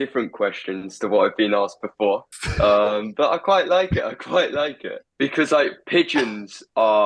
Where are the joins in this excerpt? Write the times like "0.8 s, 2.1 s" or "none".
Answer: 5.4 s